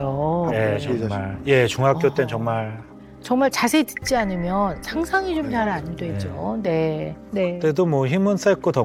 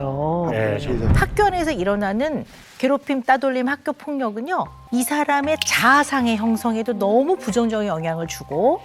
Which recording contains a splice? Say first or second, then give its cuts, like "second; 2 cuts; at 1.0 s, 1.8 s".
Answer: second; 2 cuts; at 1.1 s, 4.8 s